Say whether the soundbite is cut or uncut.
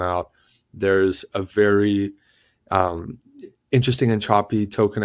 uncut